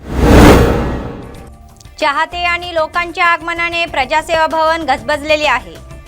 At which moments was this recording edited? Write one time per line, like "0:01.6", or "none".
0:00.9